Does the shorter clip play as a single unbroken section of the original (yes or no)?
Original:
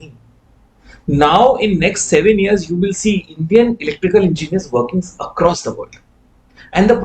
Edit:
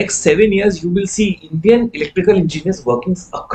yes